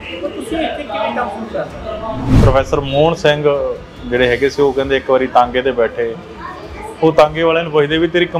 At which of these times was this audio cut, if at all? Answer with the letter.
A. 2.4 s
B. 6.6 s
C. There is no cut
A